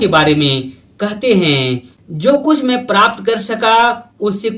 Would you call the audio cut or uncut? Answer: cut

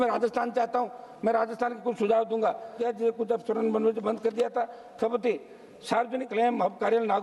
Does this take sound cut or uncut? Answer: cut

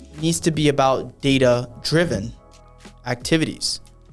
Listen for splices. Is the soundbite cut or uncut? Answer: uncut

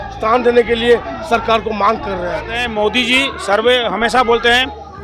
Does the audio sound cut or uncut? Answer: cut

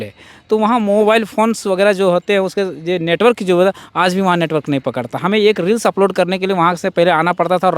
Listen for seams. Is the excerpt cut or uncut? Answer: uncut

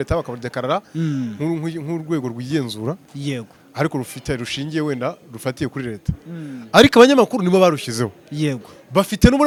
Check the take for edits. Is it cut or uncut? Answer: uncut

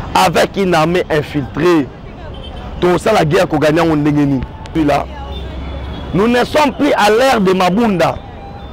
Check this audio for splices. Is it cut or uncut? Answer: cut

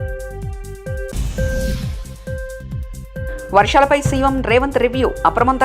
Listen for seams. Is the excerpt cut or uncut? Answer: cut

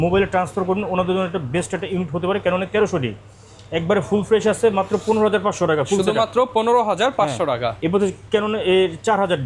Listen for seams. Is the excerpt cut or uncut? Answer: uncut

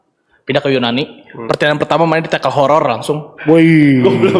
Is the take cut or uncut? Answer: uncut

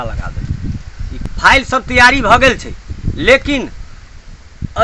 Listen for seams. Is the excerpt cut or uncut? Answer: cut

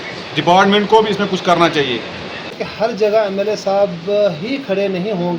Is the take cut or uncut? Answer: cut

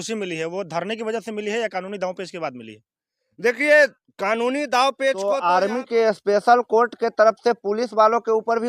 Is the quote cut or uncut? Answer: cut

